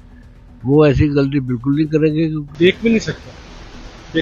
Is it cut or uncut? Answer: cut